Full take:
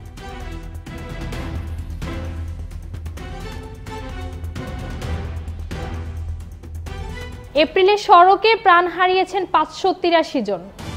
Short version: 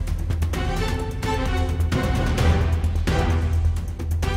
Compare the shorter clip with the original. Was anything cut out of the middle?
no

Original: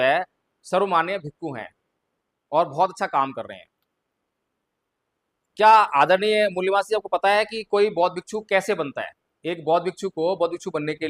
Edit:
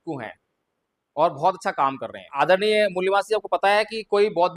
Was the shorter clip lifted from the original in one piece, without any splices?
no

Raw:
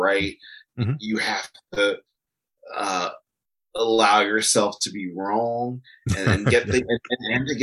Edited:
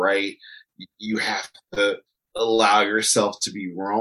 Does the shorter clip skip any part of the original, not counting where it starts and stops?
yes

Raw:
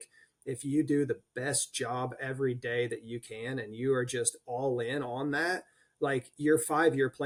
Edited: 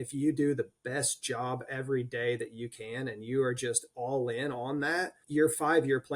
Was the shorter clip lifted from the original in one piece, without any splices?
no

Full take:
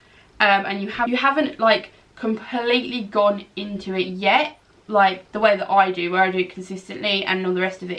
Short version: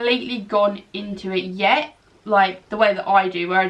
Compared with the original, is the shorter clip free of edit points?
yes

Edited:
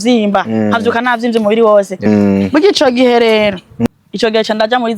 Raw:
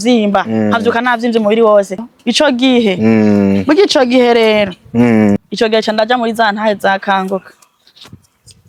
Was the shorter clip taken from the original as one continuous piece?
no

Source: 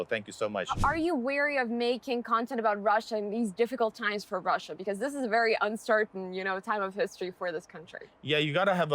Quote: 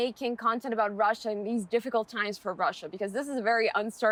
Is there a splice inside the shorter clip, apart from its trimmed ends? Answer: no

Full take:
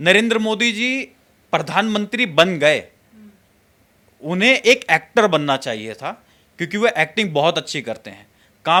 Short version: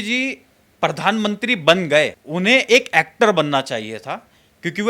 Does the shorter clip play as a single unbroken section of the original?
no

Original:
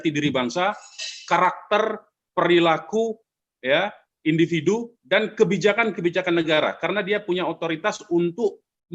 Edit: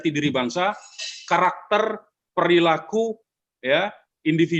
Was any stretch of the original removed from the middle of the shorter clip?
no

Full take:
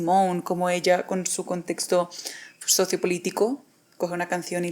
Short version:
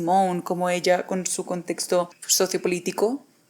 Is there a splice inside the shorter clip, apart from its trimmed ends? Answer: yes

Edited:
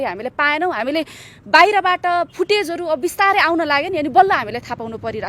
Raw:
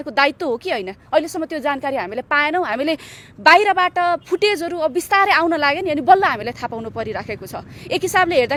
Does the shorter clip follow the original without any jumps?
yes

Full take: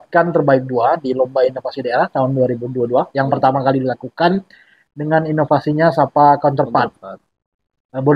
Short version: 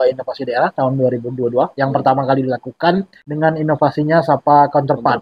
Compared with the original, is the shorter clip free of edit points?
no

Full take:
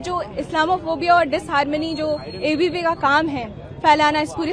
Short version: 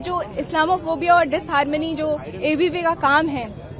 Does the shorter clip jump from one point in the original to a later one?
no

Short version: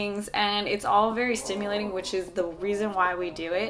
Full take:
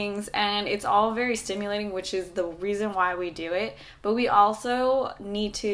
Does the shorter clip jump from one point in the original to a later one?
no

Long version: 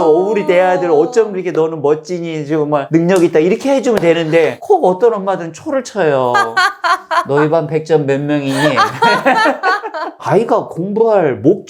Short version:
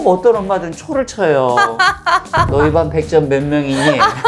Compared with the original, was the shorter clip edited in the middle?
no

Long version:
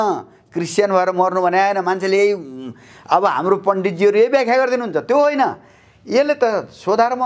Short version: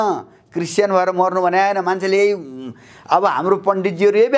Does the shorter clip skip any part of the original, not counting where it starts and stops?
no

